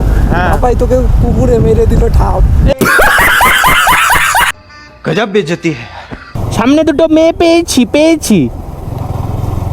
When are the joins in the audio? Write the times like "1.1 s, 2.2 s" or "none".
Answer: 6.3 s